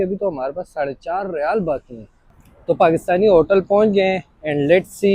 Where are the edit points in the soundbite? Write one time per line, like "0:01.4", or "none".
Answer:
0:02.2

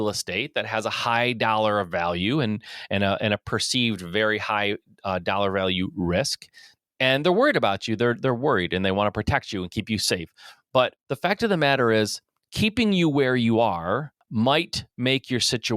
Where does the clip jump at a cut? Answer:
0:11.0
0:14.2

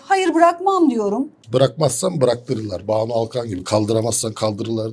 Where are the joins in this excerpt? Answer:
0:01.4

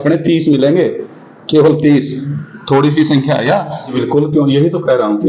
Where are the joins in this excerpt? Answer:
0:03.9

